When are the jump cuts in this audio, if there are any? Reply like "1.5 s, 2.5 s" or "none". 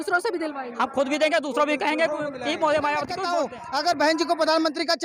3.2 s